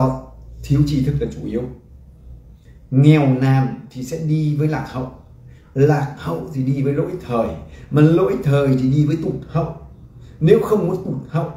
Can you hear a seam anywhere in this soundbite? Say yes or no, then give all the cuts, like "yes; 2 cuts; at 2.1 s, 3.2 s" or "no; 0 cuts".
no; 0 cuts